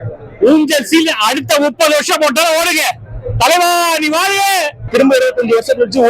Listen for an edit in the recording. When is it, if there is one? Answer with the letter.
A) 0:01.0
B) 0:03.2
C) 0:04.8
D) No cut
C